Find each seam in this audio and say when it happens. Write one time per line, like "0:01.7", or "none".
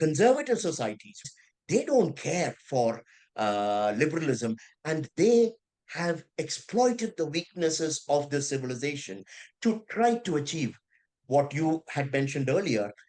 0:01.3